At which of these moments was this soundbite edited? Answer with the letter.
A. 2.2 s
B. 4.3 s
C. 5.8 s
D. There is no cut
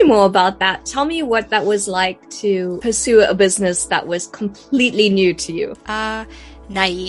D